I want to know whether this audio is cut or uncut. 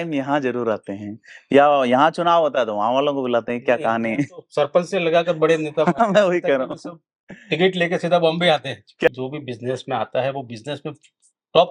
cut